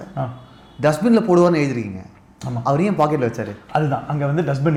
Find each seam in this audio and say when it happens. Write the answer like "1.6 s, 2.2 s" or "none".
none